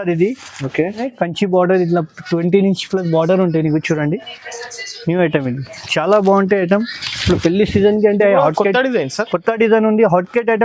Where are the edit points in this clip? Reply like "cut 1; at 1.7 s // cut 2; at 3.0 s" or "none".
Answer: cut 1; at 1.0 s